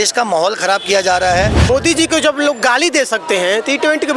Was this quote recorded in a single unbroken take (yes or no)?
no